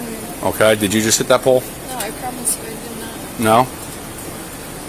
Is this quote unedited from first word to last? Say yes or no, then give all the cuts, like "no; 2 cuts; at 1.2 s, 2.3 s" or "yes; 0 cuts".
yes; 0 cuts